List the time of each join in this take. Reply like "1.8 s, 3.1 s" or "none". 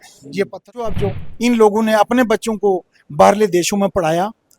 0.9 s